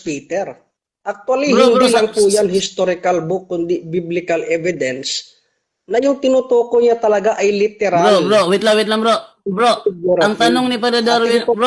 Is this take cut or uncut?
uncut